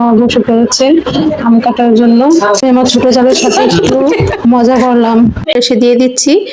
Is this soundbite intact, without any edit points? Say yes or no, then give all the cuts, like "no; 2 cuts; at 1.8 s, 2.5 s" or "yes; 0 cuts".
no; 2 cuts; at 2.6 s, 5.5 s